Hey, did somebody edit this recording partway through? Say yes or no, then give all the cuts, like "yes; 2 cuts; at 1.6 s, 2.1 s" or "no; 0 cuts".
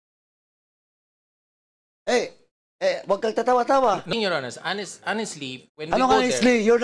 yes; 1 cut; at 4.1 s